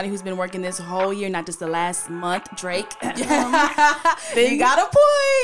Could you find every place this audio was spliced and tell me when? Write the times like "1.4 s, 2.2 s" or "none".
none